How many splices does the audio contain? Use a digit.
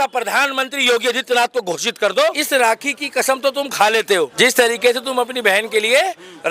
2